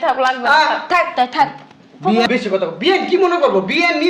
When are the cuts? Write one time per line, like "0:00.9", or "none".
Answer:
0:02.3